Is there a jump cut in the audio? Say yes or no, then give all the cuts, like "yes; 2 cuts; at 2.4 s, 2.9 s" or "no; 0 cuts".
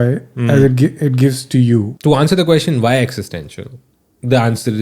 yes; 1 cut; at 1.9 s